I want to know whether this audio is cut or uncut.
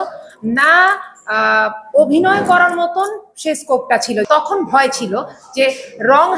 cut